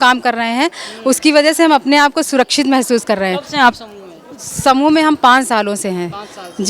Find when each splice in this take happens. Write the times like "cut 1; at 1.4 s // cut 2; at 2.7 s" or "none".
none